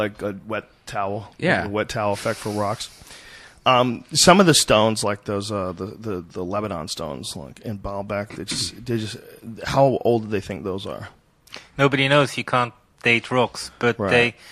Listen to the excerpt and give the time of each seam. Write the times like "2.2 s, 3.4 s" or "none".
10.5 s